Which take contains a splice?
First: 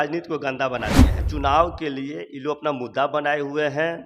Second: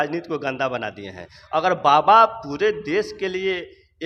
first; 1 cut; at 1.3 s

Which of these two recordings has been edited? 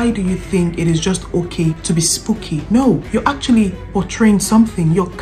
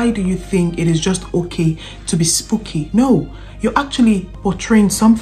first; 2 cuts; at 1.8 s, 3.0 s

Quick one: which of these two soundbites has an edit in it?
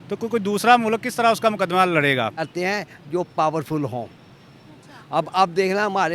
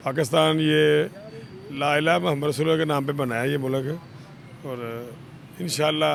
first; 1 cut; at 2.4 s

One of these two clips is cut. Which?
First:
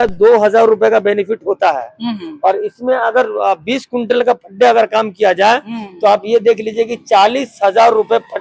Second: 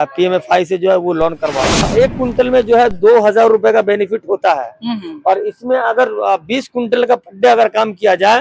second; 1 cut; at 1.9 s

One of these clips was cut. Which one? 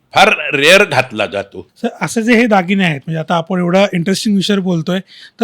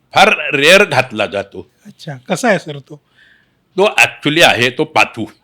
first; 1 cut; at 1.6 s

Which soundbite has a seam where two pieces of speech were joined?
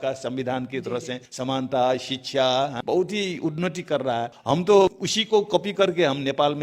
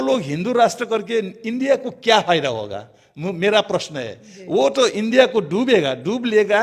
first; 4 cuts; at 1.2 s, 2.8 s, 4.4 s, 5.1 s

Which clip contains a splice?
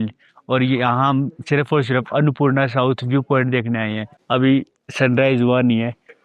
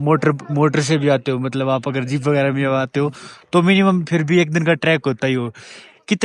first; 1 cut; at 4.1 s

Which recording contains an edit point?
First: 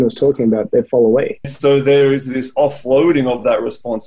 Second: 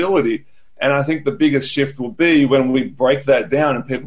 first; 1 cut; at 1.5 s

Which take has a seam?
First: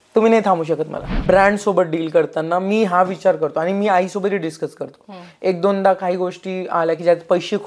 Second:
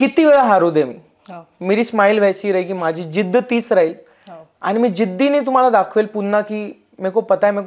first; 1 cut; at 1.2 s

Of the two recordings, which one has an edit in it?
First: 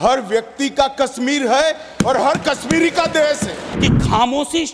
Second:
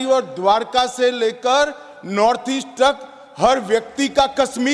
first; 1 cut; at 3.6 s

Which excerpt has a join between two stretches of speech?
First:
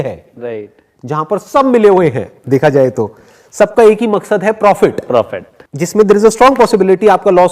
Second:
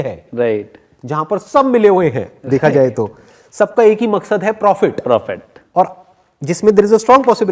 first; 1 cut; at 5.1 s

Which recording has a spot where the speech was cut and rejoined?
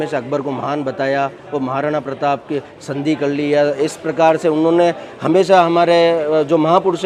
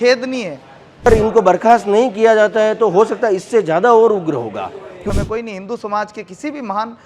second; 2 cuts; at 1.1 s, 5.1 s

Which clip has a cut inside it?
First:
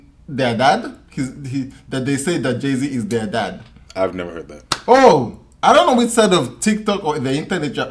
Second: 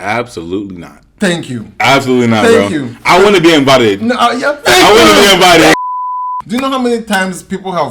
second; 1 cut; at 5.8 s

